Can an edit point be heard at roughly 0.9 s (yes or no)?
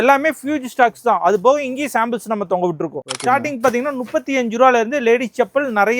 no